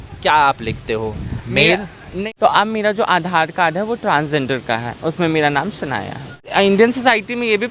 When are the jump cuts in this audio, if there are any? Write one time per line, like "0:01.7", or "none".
0:02.2
0:06.5